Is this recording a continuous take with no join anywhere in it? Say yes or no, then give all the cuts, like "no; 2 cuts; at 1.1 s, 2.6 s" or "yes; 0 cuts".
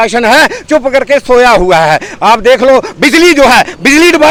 yes; 0 cuts